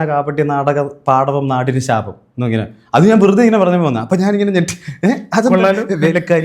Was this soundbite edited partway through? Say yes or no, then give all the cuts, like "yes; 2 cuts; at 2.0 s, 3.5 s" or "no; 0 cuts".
no; 0 cuts